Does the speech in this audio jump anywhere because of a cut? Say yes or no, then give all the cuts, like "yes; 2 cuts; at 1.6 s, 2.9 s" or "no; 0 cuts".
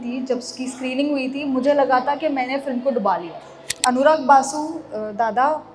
yes; 1 cut; at 3.8 s